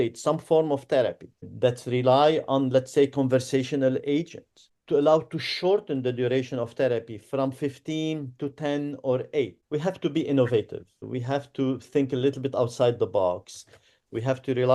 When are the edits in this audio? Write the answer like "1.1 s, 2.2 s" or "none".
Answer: 9.6 s, 11.0 s